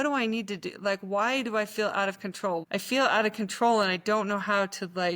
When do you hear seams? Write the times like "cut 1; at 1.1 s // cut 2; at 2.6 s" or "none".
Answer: cut 1; at 2.6 s